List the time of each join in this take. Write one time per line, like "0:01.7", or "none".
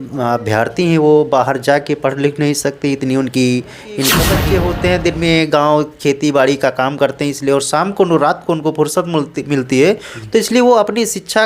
0:04.2